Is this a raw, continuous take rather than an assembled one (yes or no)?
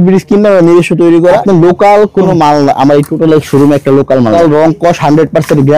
no